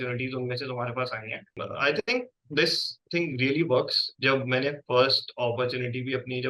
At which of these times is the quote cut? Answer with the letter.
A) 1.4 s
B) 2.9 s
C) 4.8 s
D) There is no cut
A